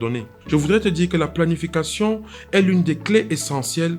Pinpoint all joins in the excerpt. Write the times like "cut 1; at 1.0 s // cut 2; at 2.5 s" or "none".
none